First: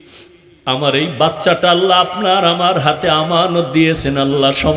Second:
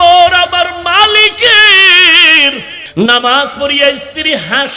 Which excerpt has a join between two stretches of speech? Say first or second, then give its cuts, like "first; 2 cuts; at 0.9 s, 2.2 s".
second; 1 cut; at 2.7 s